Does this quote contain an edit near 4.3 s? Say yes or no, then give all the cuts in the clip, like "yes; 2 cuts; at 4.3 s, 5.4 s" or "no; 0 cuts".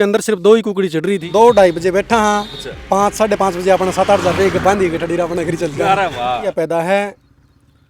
no; 2 cuts; at 1.2 s, 6.5 s